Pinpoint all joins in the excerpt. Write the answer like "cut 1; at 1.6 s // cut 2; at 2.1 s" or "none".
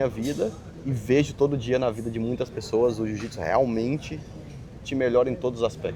none